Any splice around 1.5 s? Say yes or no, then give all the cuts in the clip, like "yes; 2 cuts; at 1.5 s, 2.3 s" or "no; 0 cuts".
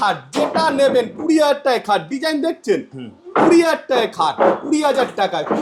no; 0 cuts